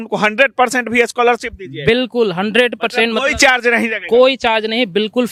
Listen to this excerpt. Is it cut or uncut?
uncut